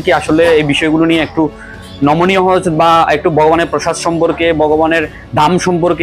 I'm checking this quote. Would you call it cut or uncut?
uncut